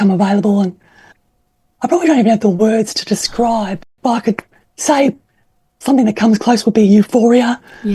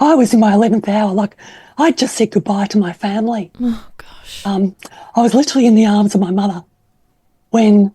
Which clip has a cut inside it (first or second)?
first